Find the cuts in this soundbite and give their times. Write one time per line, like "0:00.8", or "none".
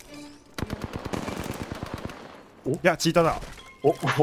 none